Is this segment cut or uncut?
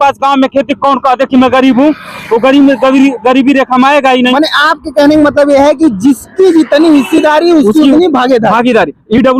uncut